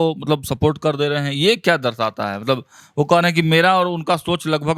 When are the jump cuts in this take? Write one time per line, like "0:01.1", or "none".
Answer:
none